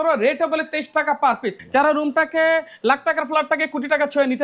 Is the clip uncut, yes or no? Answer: no